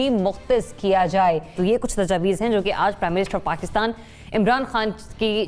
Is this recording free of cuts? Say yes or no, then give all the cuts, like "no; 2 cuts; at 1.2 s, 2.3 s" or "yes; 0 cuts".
yes; 0 cuts